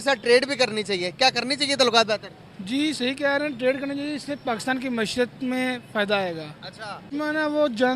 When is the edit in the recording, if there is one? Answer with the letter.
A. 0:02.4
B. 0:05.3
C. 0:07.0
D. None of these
C